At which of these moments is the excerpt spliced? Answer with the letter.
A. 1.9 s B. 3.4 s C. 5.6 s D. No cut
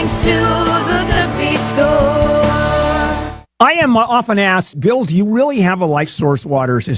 B